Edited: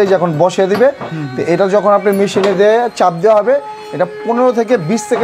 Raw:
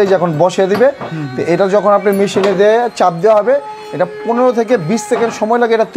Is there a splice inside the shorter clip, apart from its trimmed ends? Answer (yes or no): no